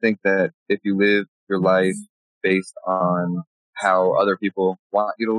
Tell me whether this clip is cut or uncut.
cut